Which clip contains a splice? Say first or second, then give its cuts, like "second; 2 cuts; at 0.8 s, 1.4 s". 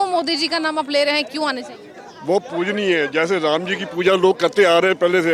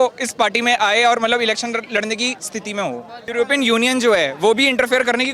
second; 1 cut; at 3.2 s